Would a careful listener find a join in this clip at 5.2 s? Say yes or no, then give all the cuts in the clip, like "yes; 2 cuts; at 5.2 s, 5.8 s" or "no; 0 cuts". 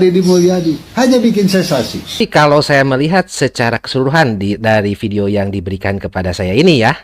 no; 1 cut; at 2.2 s